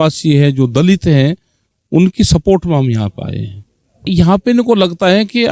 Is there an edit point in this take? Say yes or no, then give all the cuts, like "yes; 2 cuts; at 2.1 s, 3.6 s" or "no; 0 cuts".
yes; 1 cut; at 4.1 s